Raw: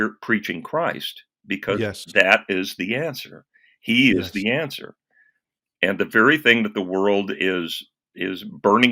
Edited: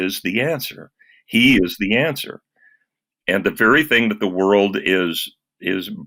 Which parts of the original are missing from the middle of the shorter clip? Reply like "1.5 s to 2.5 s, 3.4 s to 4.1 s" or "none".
none

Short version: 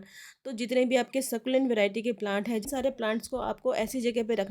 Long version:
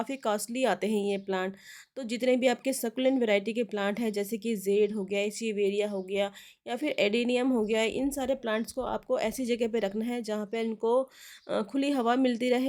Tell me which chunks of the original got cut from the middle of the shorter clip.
4.2 s to 8.1 s

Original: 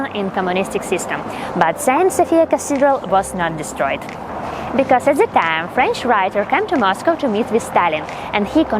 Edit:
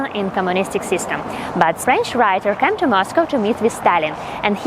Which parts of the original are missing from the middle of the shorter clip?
1.8 s to 5.7 s

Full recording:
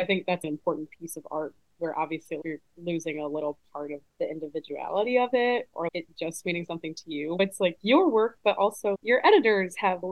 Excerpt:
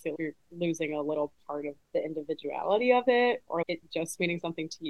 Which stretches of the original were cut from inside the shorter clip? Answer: none

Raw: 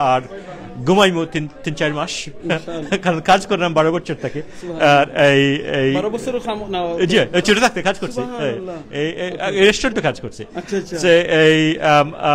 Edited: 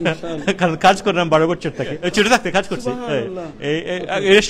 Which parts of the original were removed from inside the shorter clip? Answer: 4.5 s to 7.3 s

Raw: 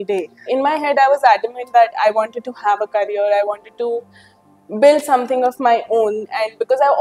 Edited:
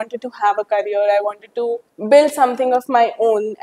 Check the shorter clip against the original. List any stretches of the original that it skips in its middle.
4.1 s to 4.6 s

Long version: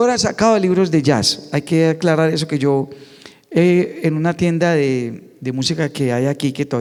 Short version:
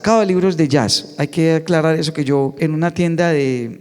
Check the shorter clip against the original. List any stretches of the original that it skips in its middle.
2.9 s to 4.0 s

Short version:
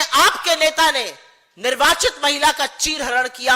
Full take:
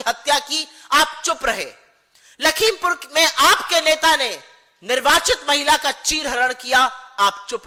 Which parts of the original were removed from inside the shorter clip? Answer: none

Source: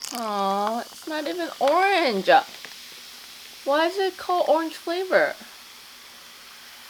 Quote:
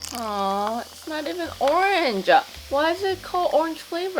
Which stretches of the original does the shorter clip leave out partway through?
2.6 s to 3.5 s

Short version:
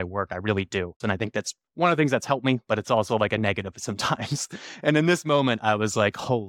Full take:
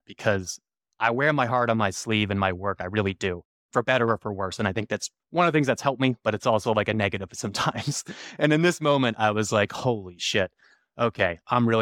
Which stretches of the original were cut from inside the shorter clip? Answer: 3.5 s to 4.5 s

